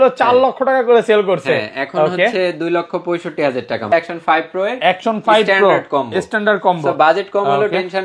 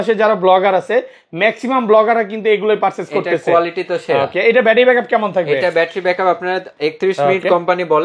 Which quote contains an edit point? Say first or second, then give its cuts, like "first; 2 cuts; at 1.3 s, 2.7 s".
first; 1 cut; at 4.0 s